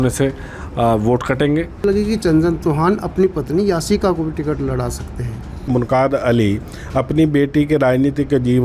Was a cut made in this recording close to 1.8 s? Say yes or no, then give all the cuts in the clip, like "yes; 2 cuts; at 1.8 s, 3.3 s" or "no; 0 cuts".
yes; 2 cuts; at 1.8 s, 5.7 s